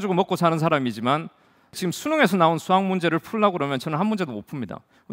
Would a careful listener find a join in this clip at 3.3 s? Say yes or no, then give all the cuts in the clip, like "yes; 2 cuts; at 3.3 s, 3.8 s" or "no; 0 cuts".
no; 1 cut; at 1.8 s